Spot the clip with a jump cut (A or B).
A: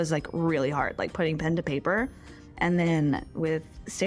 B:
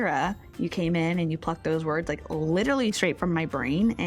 A